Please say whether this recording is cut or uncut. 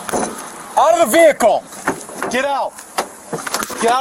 cut